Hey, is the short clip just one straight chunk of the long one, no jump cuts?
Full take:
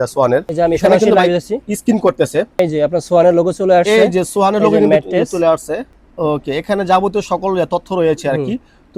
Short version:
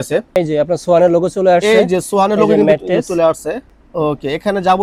yes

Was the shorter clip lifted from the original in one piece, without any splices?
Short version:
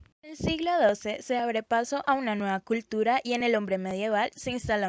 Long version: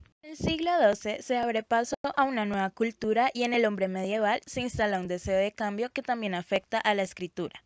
no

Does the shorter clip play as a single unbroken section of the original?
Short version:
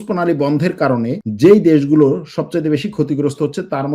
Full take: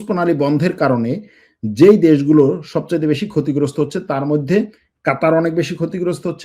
no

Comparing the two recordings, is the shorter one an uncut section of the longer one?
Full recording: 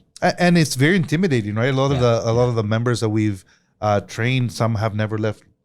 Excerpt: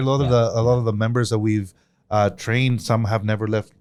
yes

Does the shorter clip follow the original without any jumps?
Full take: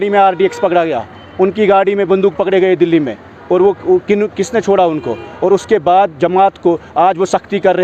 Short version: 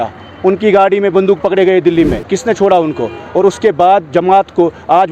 no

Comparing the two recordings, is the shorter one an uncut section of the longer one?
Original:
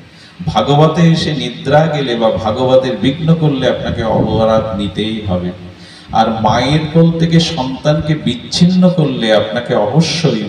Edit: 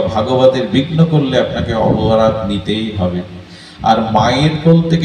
yes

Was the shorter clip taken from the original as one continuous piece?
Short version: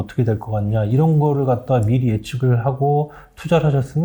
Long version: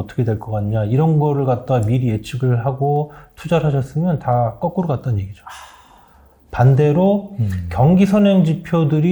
yes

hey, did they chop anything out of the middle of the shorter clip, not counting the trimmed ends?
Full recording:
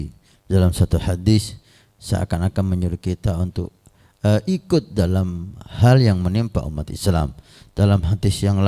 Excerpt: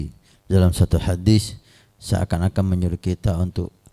no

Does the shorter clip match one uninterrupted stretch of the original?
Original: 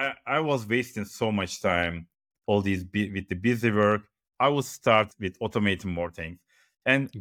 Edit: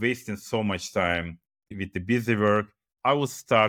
no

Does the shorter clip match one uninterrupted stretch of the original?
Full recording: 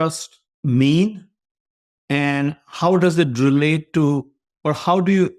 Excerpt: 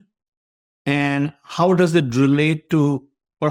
yes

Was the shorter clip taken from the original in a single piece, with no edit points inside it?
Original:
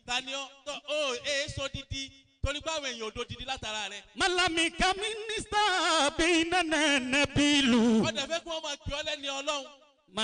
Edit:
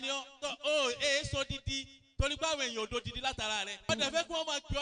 no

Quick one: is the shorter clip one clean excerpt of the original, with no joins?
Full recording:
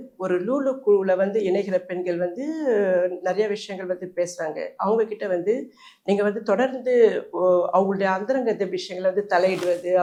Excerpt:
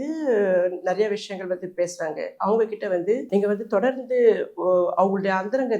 no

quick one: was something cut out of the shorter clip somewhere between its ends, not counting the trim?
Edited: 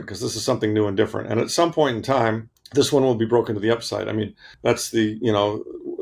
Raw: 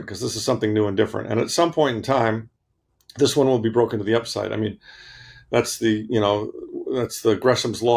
yes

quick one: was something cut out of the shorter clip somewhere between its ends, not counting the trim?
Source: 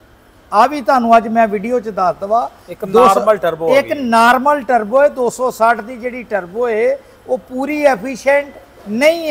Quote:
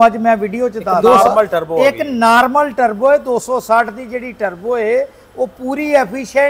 yes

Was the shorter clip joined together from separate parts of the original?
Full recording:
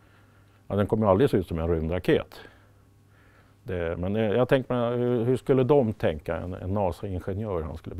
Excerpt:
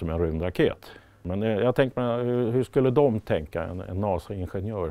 yes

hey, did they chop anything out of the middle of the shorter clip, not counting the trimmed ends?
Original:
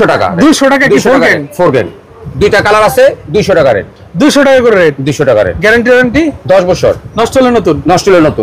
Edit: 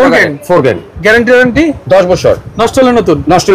yes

